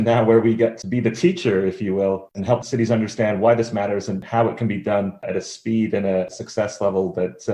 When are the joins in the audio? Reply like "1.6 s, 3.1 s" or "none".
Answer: 0.8 s, 2.6 s, 4.2 s, 5.3 s, 6.3 s

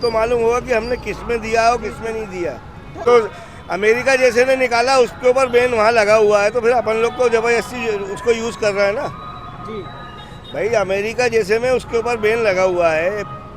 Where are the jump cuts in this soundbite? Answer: 2.9 s

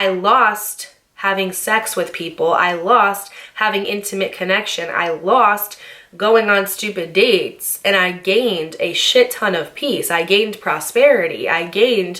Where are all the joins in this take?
none

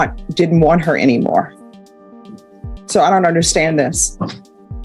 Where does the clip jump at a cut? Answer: none

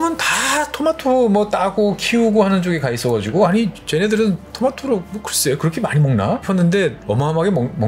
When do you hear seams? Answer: 3.8 s, 6.4 s, 7.0 s

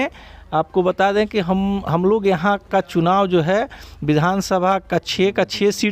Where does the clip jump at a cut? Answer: none

